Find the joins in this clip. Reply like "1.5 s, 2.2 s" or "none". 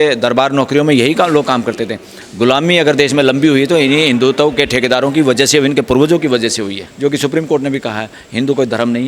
6.8 s